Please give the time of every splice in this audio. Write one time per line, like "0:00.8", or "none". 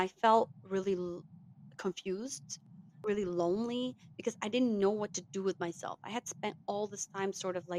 0:03.0